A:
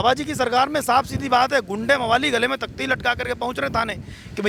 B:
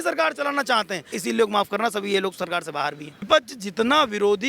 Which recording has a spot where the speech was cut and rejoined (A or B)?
B